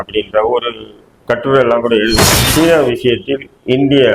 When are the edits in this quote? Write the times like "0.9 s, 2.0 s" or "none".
2.4 s